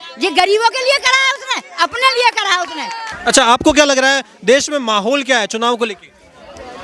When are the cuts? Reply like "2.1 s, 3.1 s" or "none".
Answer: 3.2 s